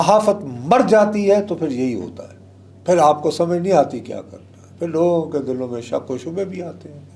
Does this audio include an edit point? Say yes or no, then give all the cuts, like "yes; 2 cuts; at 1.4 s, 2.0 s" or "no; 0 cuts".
no; 0 cuts